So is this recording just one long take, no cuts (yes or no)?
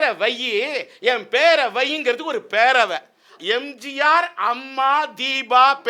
no